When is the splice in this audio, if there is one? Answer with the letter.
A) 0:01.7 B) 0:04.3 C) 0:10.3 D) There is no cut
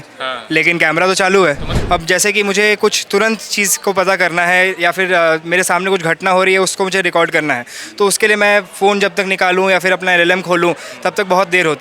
A